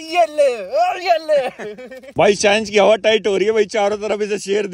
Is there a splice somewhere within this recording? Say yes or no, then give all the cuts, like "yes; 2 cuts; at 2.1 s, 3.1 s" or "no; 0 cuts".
yes; 1 cut; at 2.1 s